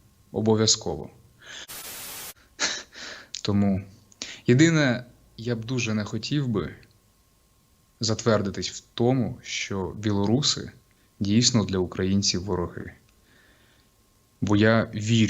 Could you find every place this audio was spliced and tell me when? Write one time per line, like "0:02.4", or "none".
0:01.8